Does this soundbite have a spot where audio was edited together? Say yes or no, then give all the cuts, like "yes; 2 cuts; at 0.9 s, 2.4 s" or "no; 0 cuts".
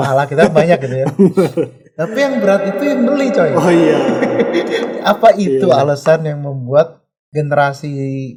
no; 0 cuts